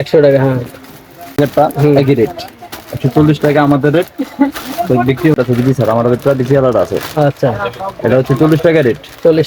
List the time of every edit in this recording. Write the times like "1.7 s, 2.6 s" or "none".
1.4 s, 5.3 s